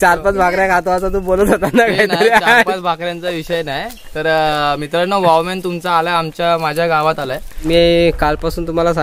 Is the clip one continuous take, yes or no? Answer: no